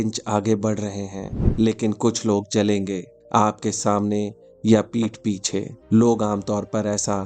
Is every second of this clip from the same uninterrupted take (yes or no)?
no